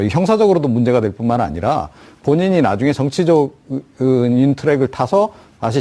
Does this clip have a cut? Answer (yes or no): yes